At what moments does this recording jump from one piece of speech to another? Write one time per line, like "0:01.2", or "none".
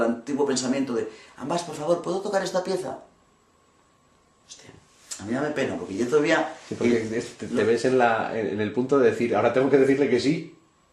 0:08.1

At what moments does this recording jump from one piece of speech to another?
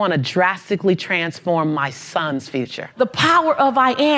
0:02.8

